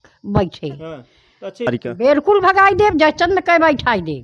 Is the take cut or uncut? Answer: cut